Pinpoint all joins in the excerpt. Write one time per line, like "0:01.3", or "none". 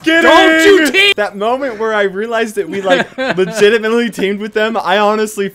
0:01.1

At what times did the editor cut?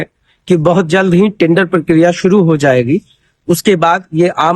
none

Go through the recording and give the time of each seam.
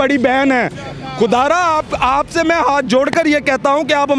none

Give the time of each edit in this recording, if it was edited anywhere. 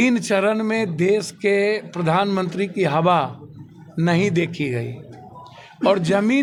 none

